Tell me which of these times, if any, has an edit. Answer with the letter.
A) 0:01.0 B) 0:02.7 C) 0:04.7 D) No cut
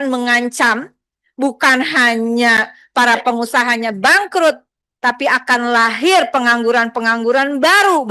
D